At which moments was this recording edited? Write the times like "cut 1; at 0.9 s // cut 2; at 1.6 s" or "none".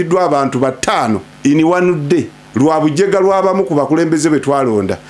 cut 1; at 1.3 s // cut 2; at 2.4 s